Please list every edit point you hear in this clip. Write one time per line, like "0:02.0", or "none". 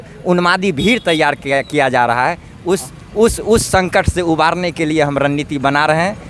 none

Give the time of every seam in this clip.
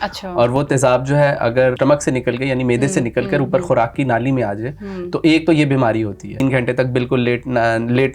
0:01.8
0:06.4

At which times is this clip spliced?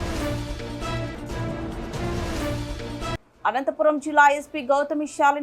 0:03.2

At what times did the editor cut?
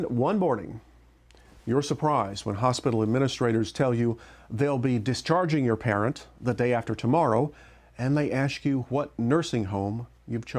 0:03.9

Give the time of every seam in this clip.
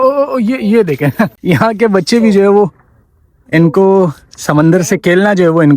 0:01.3

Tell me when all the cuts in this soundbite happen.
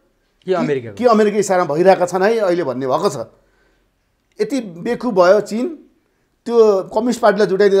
none

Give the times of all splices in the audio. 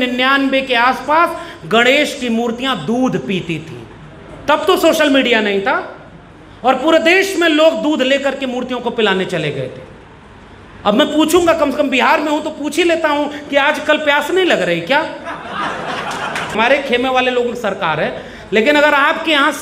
0:16.5

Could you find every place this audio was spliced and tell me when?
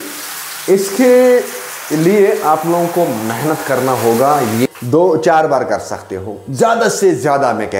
0:04.7

